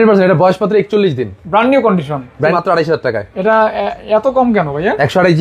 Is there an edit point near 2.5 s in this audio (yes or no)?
yes